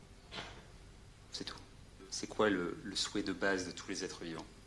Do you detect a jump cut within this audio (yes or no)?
yes